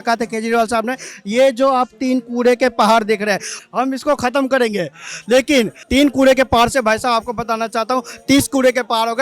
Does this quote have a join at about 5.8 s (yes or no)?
yes